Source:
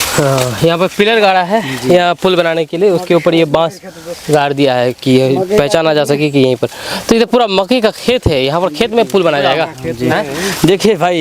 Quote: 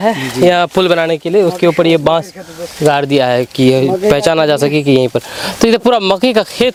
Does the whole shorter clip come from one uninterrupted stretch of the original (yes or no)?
yes